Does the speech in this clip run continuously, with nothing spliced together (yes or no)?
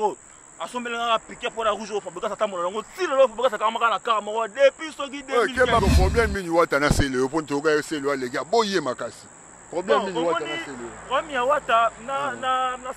no